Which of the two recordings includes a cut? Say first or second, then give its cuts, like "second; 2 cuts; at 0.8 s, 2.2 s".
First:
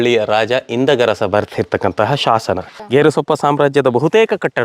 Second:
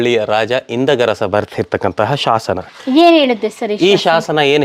first; 1 cut; at 2.8 s